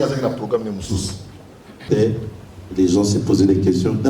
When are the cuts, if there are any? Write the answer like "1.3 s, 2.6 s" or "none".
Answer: 1.8 s